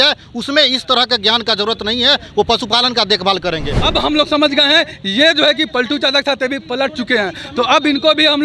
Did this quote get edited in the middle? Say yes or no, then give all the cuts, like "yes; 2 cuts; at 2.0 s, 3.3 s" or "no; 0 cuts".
yes; 1 cut; at 3.7 s